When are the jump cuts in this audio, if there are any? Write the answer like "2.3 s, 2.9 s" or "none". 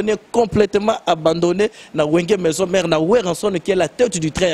none